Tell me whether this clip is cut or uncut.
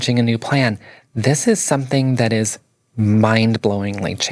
uncut